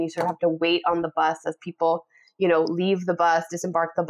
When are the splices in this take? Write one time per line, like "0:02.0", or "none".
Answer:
none